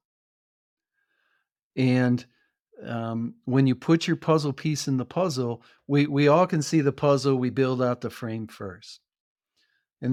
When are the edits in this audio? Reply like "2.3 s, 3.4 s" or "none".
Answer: none